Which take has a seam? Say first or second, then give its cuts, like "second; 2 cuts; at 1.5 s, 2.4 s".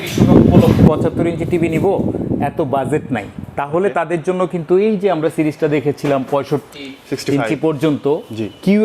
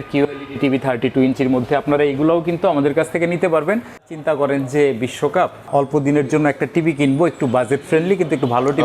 second; 2 cuts; at 4.1 s, 5.7 s